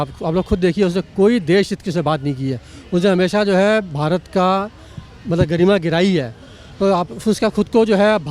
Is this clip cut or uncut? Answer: uncut